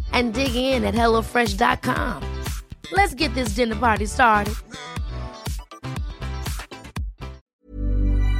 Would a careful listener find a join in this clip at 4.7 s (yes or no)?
no